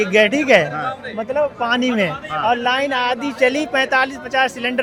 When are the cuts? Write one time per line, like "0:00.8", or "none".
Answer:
none